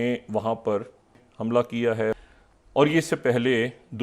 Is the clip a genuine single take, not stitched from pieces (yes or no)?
no